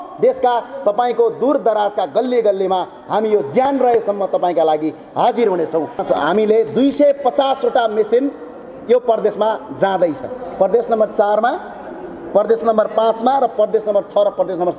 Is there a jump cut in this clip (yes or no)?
yes